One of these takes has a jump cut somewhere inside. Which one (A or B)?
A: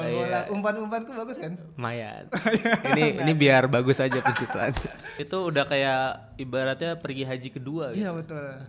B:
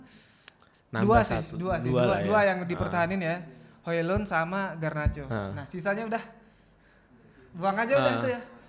A